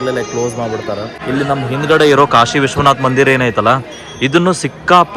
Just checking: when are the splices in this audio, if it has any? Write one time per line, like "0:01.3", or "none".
0:01.1